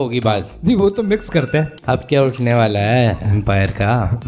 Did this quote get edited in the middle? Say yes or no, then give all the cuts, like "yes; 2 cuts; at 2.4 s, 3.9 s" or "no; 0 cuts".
yes; 1 cut; at 1.8 s